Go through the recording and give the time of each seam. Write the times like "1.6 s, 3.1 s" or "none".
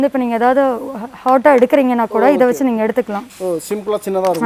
none